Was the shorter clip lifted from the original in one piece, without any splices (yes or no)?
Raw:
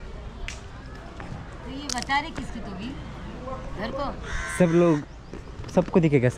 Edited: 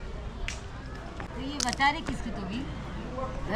no